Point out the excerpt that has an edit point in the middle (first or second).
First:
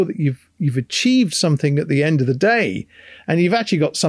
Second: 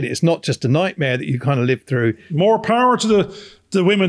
second